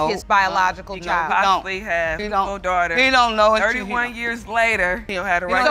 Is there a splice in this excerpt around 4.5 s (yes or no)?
no